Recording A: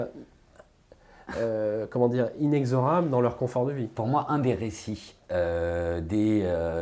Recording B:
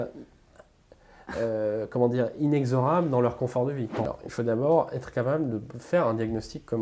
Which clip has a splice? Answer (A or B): B